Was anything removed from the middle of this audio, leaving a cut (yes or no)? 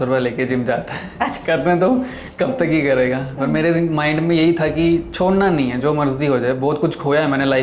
no